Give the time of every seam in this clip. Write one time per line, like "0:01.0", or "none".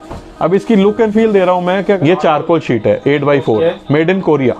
0:02.0